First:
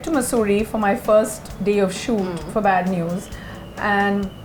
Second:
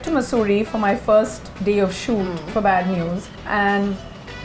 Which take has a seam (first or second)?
second